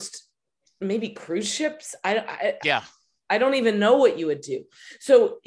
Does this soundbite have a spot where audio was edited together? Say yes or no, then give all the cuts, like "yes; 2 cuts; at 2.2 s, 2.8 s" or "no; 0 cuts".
no; 0 cuts